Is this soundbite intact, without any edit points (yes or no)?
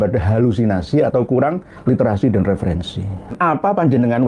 no